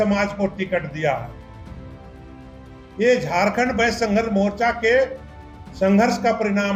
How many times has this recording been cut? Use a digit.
0